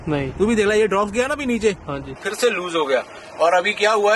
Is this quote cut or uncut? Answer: cut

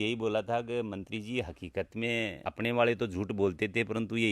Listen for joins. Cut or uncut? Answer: uncut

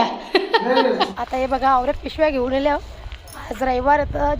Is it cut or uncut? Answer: cut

